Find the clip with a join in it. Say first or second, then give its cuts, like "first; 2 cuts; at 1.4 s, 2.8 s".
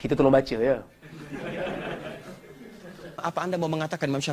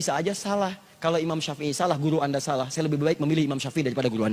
first; 1 cut; at 3.2 s